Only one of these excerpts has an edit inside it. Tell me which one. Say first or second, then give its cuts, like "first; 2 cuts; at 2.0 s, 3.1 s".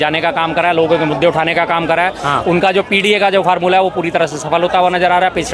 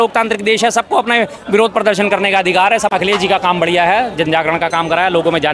second; 1 cut; at 2.9 s